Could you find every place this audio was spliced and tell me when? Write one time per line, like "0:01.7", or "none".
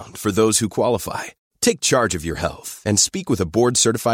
none